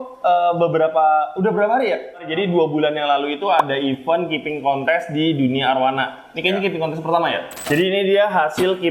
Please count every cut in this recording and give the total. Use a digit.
2